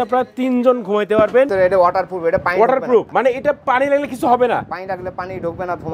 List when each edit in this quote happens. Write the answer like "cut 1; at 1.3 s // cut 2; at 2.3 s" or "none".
cut 1; at 1.5 s // cut 2; at 3.1 s